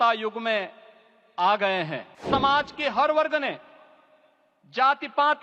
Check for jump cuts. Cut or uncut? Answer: cut